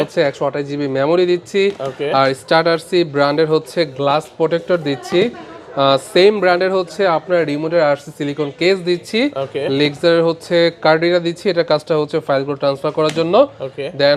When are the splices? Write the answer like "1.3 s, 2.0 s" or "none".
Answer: none